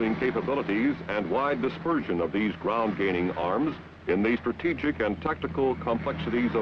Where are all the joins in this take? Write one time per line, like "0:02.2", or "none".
0:01.3